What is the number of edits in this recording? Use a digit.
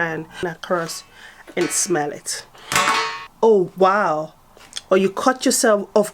1